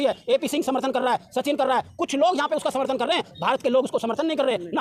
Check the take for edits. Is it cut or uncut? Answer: uncut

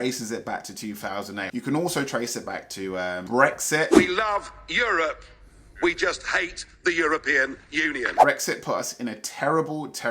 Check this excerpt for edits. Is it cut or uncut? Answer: cut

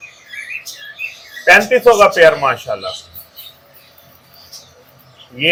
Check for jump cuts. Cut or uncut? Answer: uncut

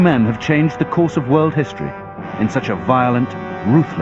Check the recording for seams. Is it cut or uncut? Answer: cut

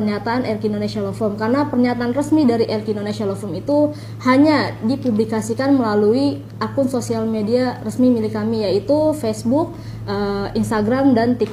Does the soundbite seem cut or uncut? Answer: uncut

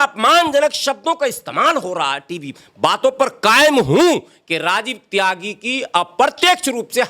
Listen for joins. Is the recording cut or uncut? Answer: cut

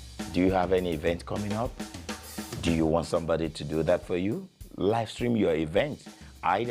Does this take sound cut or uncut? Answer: cut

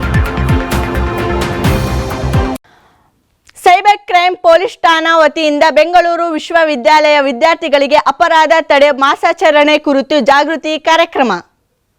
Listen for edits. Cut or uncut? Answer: uncut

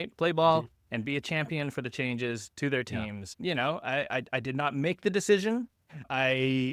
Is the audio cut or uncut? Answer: cut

